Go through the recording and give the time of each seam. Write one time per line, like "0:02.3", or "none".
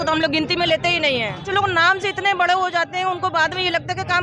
0:01.5